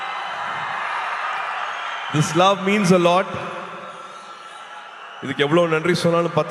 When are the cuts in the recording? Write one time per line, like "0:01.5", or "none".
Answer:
none